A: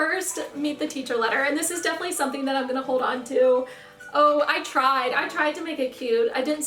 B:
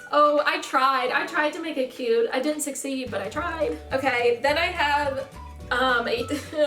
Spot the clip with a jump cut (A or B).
B